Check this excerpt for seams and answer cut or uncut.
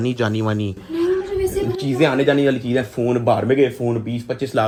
uncut